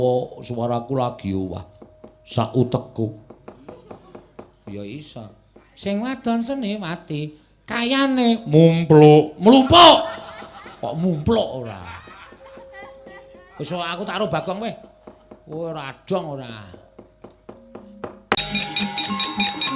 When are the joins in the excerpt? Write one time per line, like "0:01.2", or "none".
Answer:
0:18.3